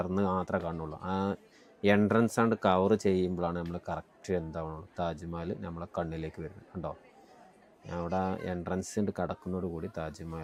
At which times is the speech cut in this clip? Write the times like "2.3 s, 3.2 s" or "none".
none